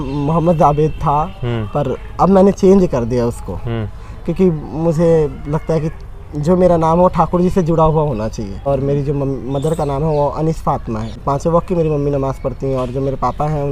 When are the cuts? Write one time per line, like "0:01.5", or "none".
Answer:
0:08.7
0:11.2